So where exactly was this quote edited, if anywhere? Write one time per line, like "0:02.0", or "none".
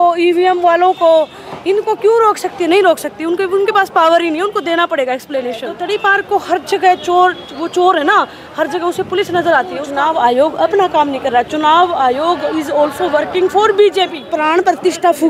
0:05.7
0:09.8
0:14.2